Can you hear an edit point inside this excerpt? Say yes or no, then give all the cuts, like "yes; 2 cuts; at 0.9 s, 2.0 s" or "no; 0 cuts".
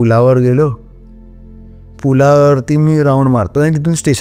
no; 0 cuts